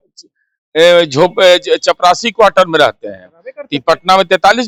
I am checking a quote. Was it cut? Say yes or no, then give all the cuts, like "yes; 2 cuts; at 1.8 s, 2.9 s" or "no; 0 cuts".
no; 0 cuts